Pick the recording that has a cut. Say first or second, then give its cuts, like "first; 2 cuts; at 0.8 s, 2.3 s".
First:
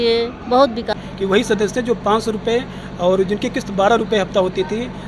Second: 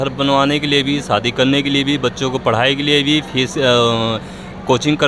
first; 1 cut; at 0.9 s